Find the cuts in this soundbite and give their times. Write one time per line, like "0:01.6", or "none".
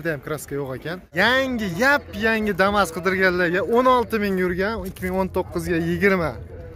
0:01.1